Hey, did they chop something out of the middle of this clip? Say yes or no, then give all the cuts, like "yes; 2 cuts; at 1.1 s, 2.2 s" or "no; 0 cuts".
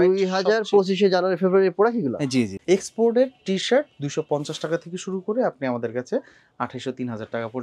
yes; 1 cut; at 2.6 s